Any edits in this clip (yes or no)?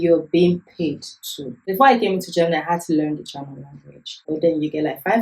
yes